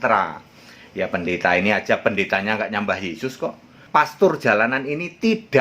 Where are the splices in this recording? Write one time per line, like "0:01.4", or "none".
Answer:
0:03.8